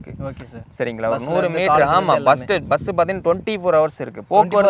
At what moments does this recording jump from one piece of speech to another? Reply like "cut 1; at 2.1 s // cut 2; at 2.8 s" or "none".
none